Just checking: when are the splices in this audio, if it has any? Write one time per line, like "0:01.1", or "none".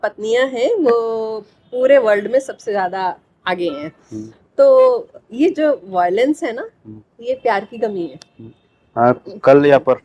none